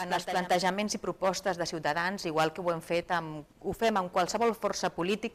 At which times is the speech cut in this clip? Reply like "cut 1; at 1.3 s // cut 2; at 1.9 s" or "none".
none